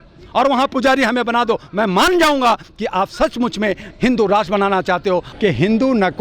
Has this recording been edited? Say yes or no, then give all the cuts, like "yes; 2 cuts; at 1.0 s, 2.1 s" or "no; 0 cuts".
yes; 1 cut; at 5.3 s